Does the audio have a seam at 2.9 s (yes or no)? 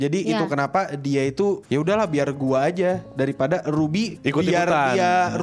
no